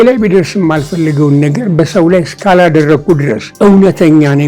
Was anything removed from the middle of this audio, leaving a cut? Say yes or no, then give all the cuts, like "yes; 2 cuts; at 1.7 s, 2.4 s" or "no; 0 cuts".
yes; 1 cut; at 3.4 s